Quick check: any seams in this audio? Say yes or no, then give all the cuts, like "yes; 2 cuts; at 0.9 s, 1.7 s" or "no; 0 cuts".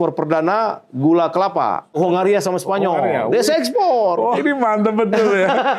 yes; 2 cuts; at 1.9 s, 4.4 s